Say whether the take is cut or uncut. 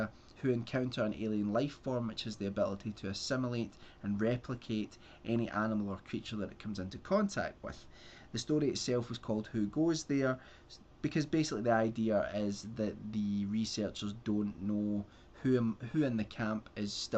uncut